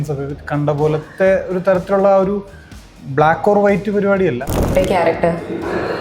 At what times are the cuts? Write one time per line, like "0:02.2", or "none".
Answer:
0:04.7